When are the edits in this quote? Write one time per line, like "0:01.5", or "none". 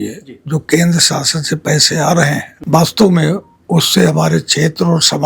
0:02.5